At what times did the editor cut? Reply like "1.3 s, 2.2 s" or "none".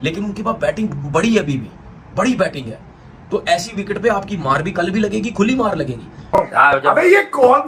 6.2 s